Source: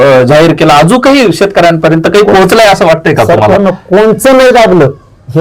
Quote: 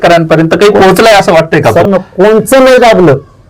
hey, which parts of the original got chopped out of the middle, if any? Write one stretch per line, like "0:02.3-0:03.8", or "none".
0:03.4-0:03.6

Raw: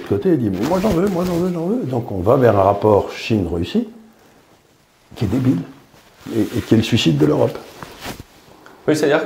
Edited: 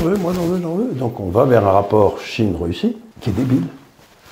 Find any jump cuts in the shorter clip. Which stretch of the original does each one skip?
0:04.0-0:05.0

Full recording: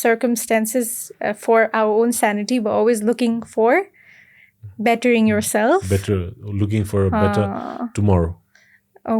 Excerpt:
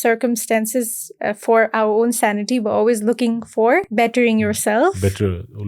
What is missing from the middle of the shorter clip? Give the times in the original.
0:03.9-0:04.8

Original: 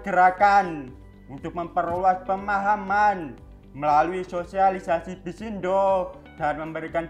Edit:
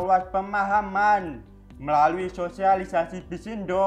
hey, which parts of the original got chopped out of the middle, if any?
none

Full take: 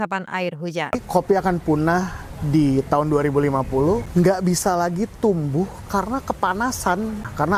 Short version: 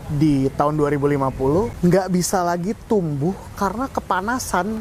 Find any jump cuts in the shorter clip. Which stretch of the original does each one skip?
none

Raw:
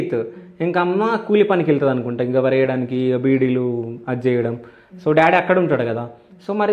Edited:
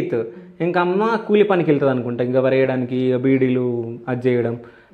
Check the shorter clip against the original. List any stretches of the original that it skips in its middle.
none

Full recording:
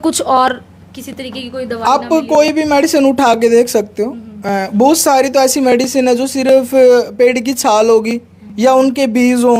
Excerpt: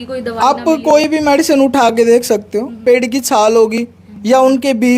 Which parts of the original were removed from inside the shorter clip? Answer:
0:04.2-0:07.1

